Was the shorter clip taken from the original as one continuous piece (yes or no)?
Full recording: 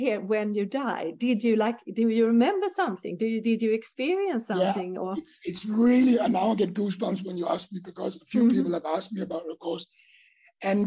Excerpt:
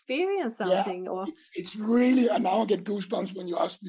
yes